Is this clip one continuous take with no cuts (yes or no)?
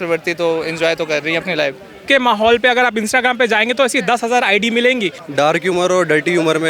no